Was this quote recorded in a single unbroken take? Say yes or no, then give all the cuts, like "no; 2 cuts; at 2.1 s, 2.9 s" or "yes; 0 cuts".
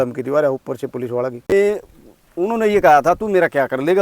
no; 1 cut; at 1.5 s